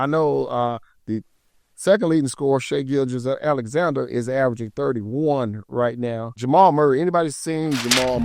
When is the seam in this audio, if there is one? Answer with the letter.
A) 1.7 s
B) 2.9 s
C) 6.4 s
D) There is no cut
C